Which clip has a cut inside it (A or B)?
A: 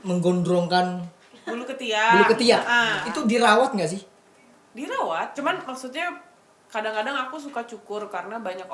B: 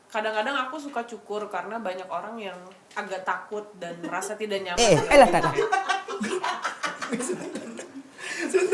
A